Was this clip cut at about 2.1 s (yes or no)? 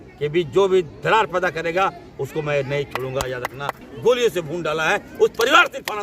no